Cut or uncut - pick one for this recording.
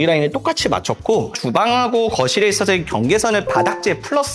uncut